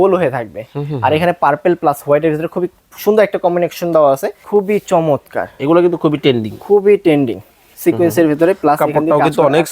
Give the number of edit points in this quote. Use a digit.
1